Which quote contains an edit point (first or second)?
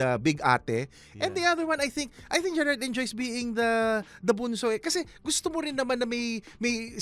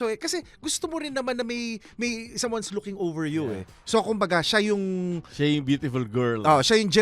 second